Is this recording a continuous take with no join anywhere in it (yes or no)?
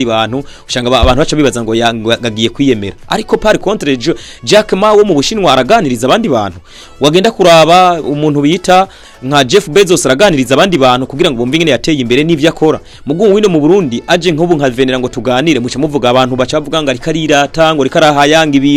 yes